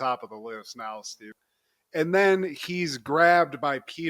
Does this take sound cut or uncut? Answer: cut